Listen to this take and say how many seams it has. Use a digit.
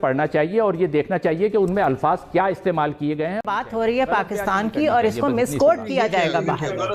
1